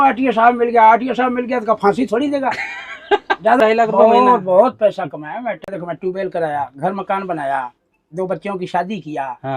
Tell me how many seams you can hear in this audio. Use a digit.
2